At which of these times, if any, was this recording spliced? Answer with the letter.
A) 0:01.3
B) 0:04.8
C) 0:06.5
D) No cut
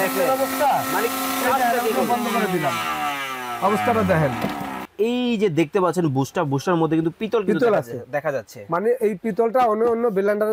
B